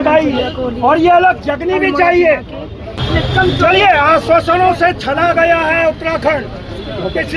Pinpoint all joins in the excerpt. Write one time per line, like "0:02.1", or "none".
0:03.0